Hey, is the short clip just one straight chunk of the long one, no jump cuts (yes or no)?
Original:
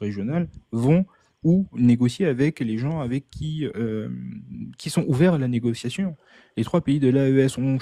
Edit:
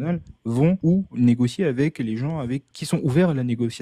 no